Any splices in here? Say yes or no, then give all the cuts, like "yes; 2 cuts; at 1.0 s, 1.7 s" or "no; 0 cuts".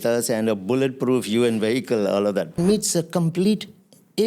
yes; 1 cut; at 2.6 s